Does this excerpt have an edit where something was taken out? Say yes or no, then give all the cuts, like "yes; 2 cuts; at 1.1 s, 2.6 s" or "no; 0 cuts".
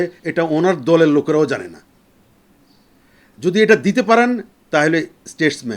no; 0 cuts